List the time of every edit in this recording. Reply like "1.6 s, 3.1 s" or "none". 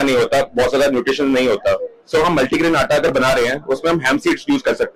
none